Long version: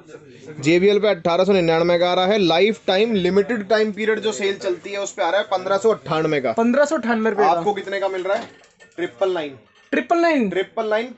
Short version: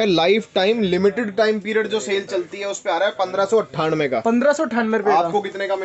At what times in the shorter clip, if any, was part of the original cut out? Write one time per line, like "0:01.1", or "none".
none